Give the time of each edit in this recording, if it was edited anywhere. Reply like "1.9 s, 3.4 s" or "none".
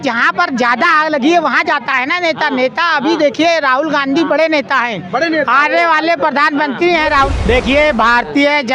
7.3 s